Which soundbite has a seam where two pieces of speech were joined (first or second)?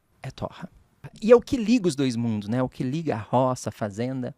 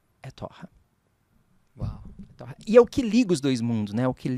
first